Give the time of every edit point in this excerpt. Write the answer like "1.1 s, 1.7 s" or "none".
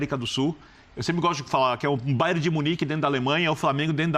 none

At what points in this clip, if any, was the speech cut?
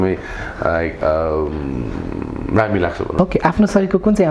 3.1 s

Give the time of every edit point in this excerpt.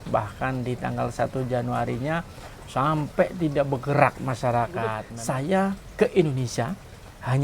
5.1 s

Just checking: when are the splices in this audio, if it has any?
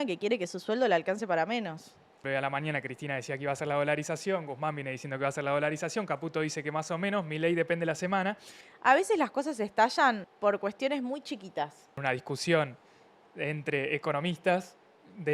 2.2 s, 8.6 s, 10.3 s, 12.0 s

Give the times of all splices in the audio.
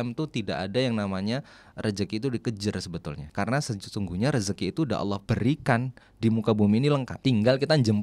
3.2 s, 5.2 s, 7.1 s

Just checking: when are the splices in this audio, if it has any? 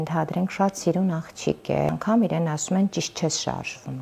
1.9 s

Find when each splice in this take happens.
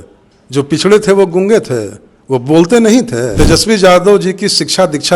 3.3 s

